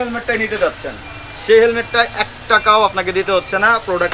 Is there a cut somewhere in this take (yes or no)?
no